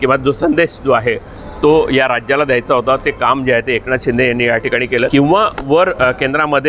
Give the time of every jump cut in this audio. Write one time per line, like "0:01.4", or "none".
0:05.1

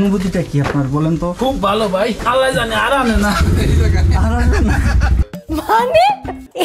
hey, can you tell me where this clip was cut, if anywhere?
none

